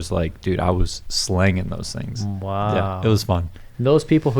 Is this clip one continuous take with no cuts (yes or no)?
yes